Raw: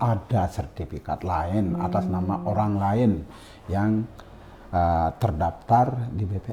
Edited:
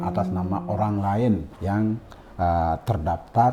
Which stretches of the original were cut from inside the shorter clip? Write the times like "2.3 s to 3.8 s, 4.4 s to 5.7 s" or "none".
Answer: 3.6 s to 4.2 s